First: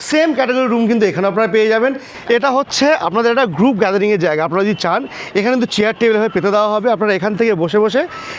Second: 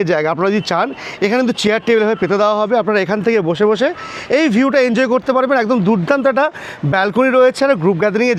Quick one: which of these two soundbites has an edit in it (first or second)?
first